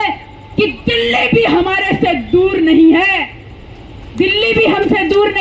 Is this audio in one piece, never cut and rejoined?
yes; 0 cuts

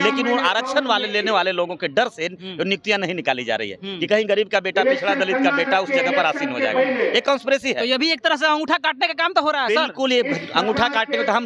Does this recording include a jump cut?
no; 0 cuts

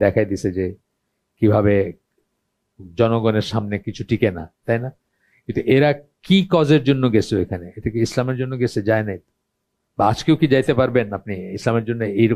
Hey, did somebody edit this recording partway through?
no; 0 cuts

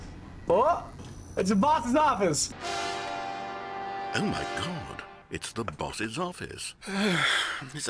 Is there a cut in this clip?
no; 0 cuts

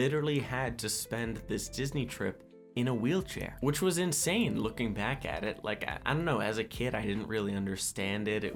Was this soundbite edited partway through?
no; 0 cuts

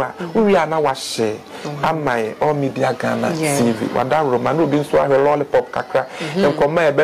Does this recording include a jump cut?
no; 0 cuts

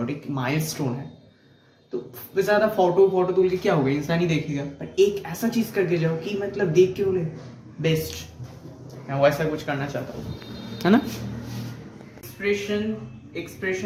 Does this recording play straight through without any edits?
yes; 0 cuts

